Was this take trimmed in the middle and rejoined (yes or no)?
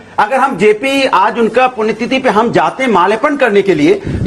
no